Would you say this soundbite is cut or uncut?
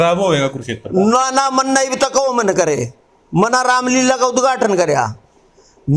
uncut